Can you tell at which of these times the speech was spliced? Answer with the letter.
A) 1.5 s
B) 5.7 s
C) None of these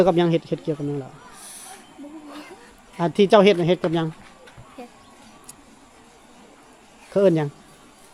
C